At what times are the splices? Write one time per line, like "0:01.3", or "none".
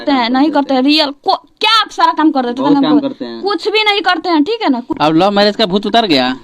0:04.9